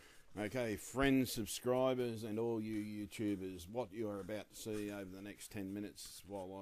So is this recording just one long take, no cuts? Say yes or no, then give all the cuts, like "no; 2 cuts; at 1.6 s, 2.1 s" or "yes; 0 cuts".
yes; 0 cuts